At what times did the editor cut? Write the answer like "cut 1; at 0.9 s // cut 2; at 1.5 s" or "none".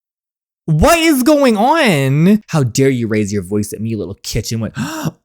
cut 1; at 2.5 s